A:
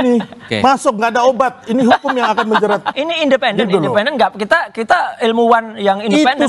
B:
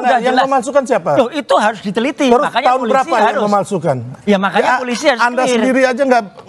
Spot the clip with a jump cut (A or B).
A